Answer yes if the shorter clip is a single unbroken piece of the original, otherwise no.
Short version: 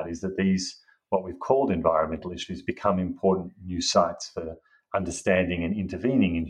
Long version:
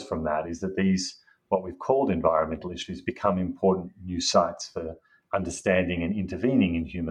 yes